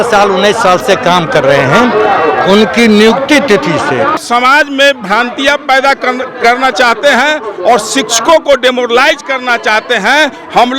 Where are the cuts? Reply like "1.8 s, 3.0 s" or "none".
4.2 s